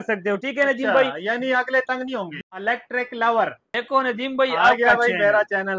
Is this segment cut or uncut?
cut